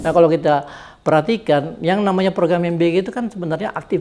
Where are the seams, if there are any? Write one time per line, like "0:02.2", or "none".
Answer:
none